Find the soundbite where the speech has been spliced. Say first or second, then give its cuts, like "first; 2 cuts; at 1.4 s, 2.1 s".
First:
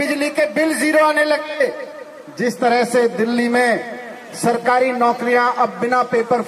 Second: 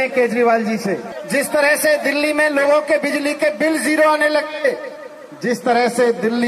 second; 1 cut; at 1.1 s